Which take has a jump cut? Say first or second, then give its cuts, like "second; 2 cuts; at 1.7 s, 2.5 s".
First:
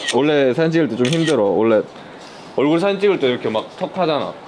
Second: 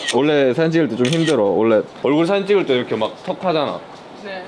second; 1 cut; at 1.9 s